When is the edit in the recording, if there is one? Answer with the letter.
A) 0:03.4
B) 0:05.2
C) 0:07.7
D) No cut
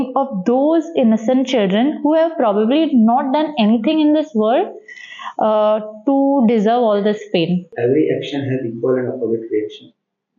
C